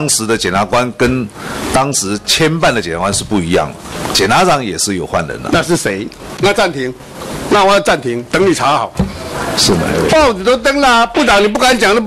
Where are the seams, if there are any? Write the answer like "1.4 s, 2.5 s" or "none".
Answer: 6.3 s